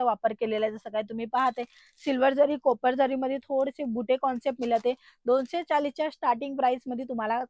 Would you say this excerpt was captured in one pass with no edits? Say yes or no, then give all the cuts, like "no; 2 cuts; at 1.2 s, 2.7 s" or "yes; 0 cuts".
yes; 0 cuts